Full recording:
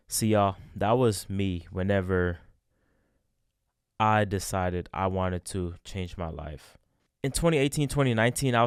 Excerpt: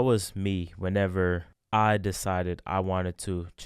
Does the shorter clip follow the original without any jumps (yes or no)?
no